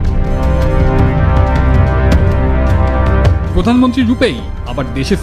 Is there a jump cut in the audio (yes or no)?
no